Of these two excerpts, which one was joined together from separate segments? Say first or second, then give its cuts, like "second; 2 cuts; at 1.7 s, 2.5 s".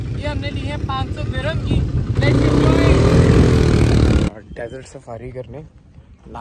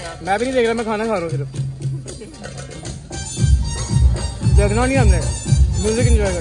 first; 1 cut; at 4.3 s